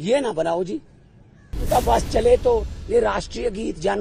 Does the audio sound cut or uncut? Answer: cut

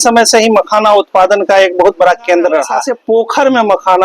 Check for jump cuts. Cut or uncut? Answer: cut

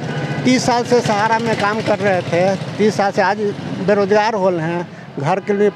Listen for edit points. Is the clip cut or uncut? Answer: uncut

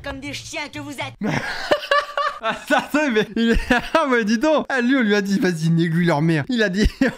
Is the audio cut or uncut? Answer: uncut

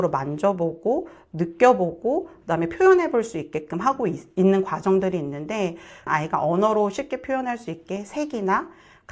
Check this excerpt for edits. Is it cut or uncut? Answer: cut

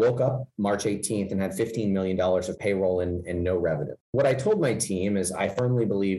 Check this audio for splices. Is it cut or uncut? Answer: cut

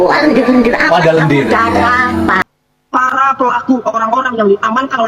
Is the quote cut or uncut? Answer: cut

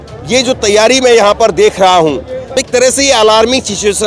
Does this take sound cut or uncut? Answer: cut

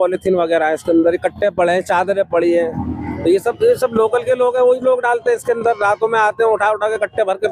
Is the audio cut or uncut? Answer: uncut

